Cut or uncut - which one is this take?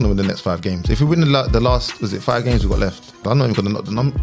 cut